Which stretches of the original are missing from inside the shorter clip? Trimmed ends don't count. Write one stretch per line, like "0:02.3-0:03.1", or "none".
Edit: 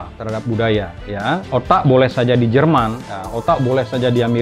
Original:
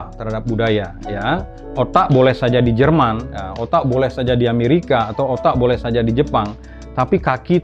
0:01.4-0:01.7